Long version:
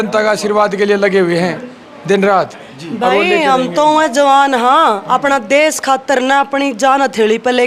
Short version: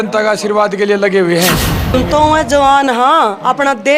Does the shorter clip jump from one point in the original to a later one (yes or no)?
yes